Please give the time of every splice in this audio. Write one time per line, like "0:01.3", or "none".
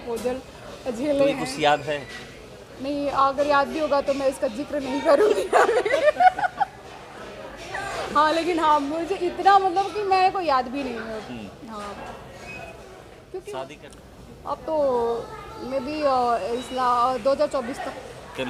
none